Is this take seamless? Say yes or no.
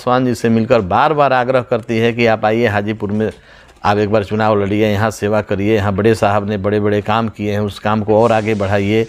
yes